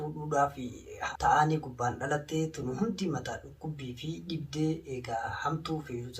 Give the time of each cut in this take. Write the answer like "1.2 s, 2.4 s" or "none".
0.9 s